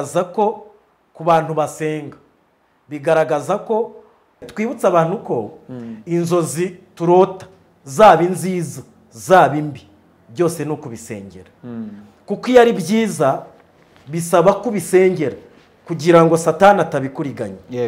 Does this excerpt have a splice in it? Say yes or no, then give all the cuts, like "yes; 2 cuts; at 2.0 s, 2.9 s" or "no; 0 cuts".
yes; 1 cut; at 4.5 s